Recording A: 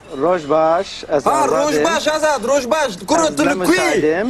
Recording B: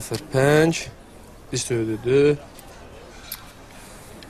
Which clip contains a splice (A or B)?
B